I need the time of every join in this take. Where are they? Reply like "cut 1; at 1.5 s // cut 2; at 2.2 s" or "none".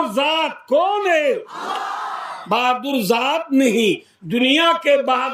none

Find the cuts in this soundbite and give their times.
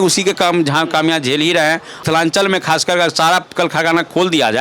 cut 1; at 2.0 s

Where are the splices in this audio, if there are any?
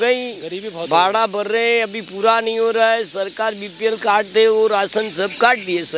none

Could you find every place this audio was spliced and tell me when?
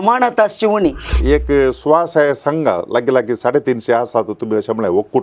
cut 1; at 1.0 s

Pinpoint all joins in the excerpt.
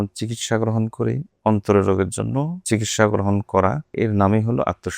cut 1; at 2.6 s // cut 2; at 3.9 s

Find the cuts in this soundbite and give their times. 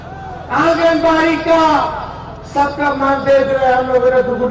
none

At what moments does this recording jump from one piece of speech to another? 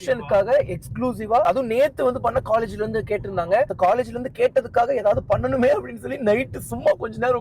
cut 1; at 1.4 s

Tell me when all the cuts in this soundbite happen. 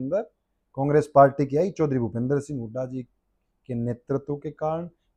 none

